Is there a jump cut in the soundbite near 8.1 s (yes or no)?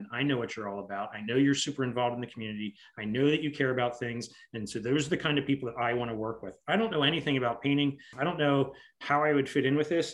yes